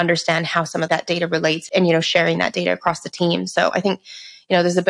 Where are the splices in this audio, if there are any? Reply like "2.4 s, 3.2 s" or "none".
1.2 s